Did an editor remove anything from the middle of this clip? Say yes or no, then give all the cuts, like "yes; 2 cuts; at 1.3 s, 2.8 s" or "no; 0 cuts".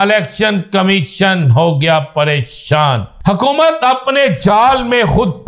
yes; 1 cut; at 3.1 s